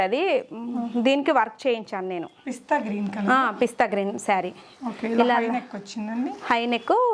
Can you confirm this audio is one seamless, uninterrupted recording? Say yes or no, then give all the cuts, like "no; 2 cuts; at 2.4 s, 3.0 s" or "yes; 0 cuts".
yes; 0 cuts